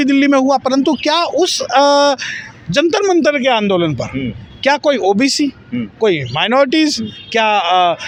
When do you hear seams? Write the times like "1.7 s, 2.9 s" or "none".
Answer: none